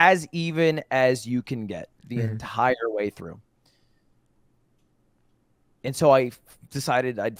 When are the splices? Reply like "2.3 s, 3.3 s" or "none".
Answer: none